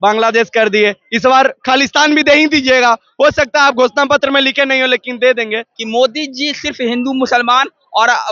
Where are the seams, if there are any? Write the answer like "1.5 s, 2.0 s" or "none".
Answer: 5.7 s